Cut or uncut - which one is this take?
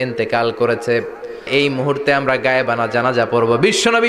cut